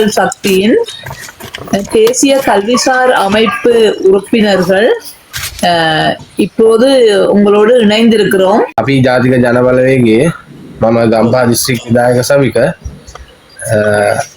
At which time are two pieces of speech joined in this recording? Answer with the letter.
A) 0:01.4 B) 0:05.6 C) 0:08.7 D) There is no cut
C